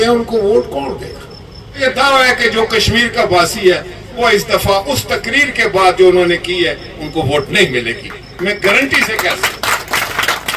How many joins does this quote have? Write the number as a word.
one